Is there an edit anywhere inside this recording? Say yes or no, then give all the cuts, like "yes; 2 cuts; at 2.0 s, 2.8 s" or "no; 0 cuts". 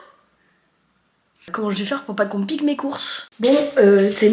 yes; 2 cuts; at 1.5 s, 3.3 s